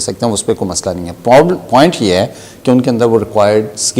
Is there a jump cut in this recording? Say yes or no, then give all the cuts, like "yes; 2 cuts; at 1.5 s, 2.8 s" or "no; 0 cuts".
no; 0 cuts